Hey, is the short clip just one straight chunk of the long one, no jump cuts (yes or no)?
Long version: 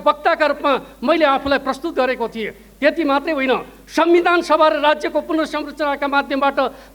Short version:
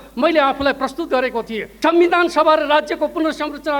no